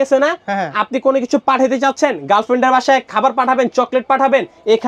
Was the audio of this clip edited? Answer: no; 0 cuts

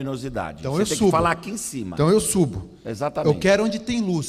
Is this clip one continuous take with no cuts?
yes; 0 cuts

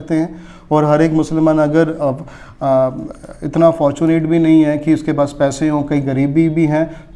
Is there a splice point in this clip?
no; 0 cuts

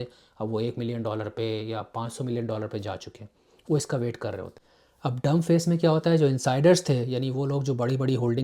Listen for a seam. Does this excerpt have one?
no; 0 cuts

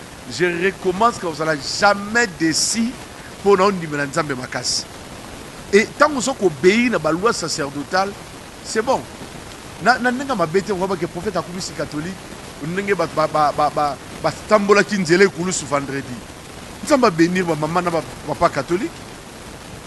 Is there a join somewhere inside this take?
yes; 1 cut; at 6.8 s

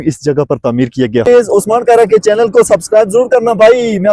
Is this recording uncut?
no; 1 cut; at 1.3 s

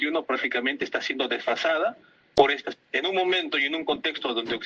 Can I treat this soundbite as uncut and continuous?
no; 1 cut; at 2.7 s

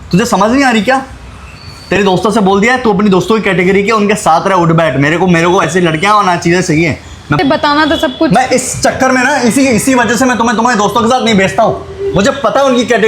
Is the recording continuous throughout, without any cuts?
no; 1 cut; at 7.4 s

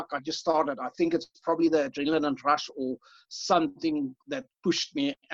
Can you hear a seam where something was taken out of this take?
yes; 1 cut; at 4.2 s

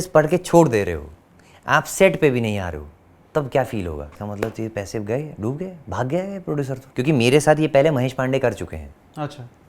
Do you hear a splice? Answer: yes; 2 cuts; at 4.2 s, 6.8 s

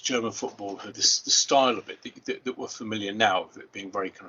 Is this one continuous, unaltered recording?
no; 1 cut; at 1.0 s

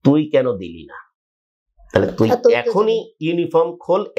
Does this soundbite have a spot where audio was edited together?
no; 0 cuts

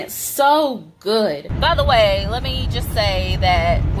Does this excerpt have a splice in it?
yes; 1 cut; at 1.5 s

